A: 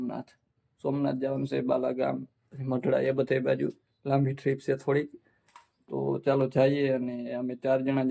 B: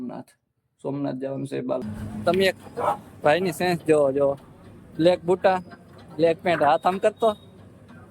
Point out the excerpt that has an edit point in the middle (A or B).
B